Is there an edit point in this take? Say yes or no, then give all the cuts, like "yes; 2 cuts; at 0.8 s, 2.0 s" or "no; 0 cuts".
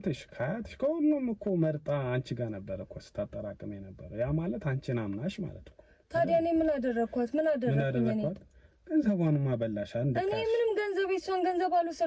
no; 0 cuts